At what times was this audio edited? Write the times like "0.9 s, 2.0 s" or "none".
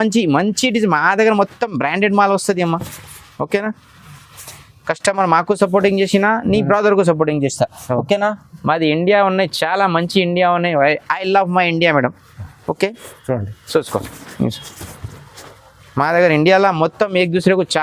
none